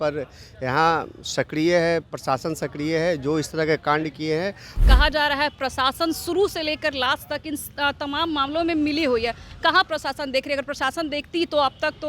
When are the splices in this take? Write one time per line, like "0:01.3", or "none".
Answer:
0:04.8